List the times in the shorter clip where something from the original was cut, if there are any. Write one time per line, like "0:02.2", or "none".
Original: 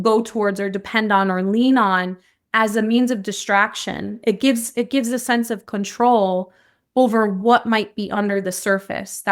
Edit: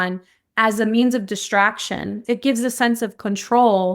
0:02.2